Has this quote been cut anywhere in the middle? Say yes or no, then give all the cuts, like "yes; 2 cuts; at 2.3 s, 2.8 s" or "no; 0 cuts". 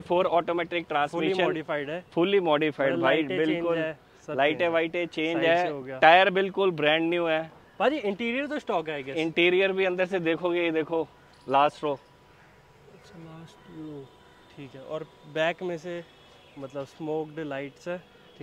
no; 0 cuts